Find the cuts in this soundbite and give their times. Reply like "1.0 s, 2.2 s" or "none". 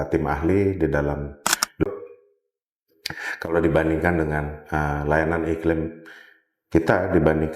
1.8 s